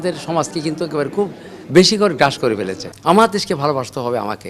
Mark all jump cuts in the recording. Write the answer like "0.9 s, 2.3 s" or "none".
2.9 s